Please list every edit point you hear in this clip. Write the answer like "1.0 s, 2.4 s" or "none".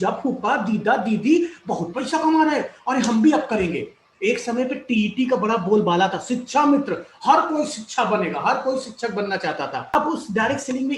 9.9 s